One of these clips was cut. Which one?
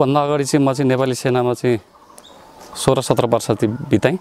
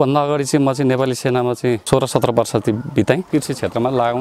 second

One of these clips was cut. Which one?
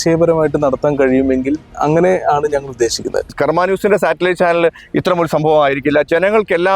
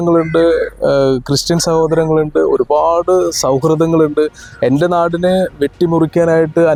first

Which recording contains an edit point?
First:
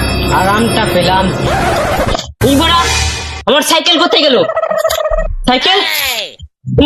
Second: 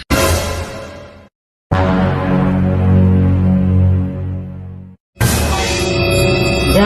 second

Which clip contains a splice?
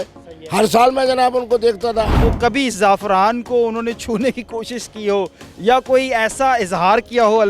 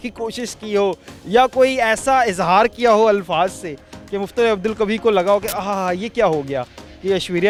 first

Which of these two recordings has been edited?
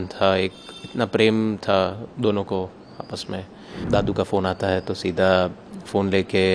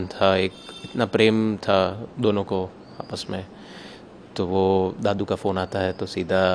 first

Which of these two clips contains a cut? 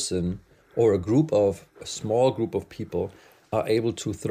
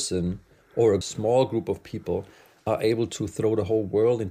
second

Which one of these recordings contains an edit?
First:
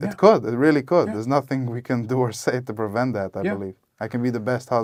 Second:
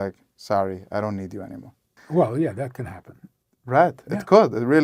second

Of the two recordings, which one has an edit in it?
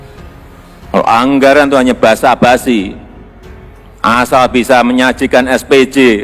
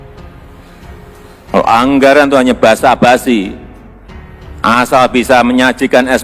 first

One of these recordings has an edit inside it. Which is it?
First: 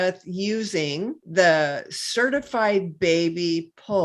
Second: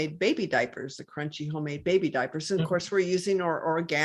first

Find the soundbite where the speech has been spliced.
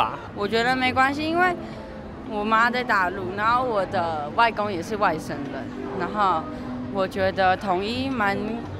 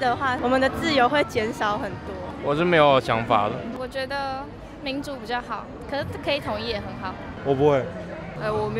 second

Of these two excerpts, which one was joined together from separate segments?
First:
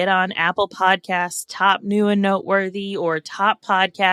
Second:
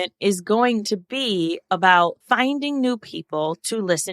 second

